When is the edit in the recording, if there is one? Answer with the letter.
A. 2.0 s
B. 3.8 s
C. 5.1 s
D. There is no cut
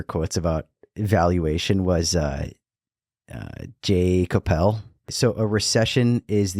C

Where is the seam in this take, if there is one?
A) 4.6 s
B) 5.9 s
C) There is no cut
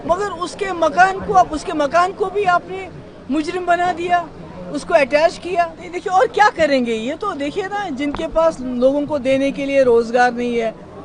B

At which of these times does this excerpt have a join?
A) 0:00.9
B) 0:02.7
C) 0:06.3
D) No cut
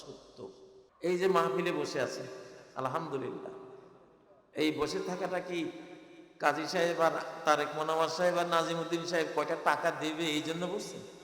A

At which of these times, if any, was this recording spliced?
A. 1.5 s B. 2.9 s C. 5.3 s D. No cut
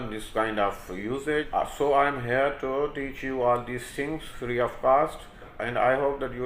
A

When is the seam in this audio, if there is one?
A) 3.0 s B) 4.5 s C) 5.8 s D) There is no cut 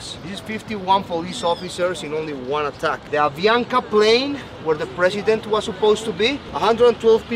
D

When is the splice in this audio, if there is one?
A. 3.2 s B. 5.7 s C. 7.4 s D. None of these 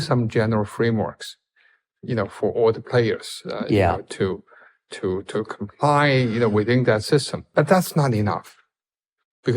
C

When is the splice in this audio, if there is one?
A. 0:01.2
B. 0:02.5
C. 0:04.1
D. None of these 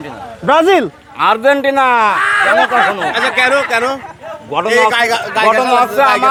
D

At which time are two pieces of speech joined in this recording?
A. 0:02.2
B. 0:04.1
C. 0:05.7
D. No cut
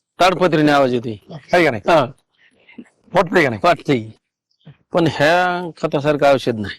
B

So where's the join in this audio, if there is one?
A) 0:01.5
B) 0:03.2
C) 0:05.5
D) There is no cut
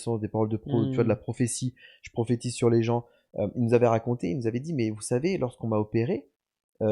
B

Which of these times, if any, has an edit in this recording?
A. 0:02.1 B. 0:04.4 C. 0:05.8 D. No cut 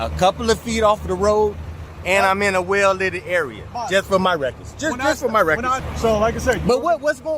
C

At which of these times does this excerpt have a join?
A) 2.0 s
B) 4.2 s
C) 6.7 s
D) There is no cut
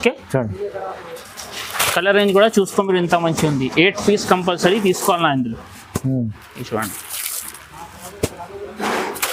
D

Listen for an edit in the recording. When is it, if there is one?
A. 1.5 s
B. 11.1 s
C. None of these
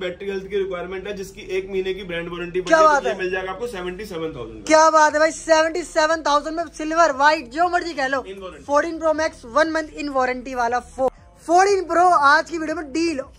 B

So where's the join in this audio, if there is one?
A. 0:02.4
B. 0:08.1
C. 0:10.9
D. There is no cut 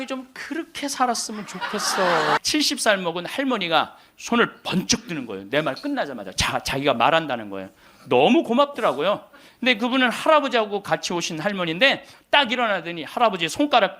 A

